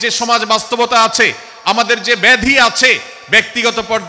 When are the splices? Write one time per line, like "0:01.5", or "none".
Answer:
none